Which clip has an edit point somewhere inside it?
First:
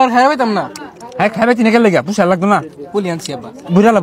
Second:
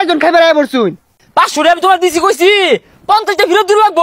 second; 1 cut; at 1.2 s

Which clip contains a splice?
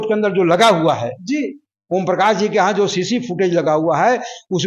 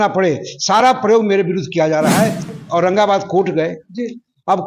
second; 1 cut; at 2.5 s

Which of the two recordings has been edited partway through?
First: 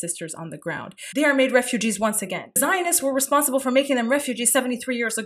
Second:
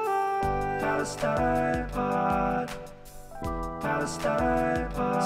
first; 2 cuts; at 0.9 s, 2.6 s

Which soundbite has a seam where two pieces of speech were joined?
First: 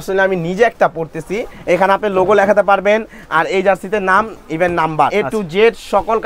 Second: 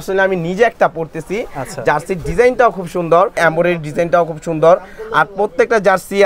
first; 2 cuts; at 1.5 s, 5.1 s

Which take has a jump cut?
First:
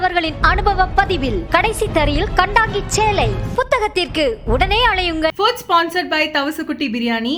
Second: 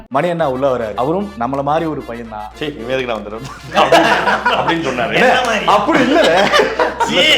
second; 2 cuts; at 0.9 s, 2.7 s

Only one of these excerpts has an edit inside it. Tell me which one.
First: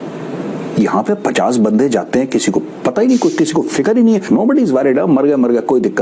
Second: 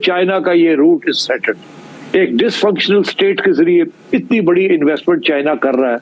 first; 1 cut; at 4.3 s

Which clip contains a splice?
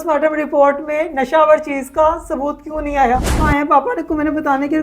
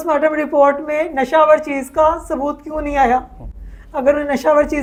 first; 1 cut; at 3.4 s

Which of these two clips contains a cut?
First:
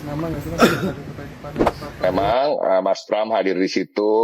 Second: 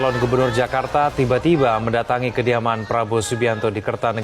first; 1 cut; at 1.8 s

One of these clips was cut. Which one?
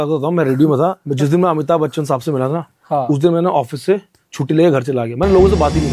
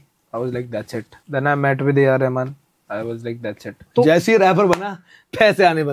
second; 2 cuts; at 1.2 s, 3.9 s

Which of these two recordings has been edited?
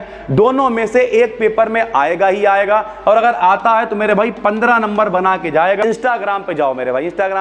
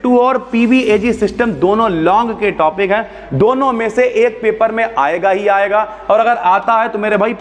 first; 1 cut; at 5.8 s

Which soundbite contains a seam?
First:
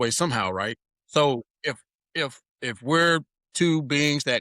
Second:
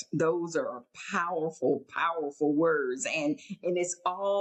first; 3 cuts; at 0.9 s, 2.5 s, 3.4 s

